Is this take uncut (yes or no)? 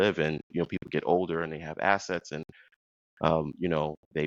yes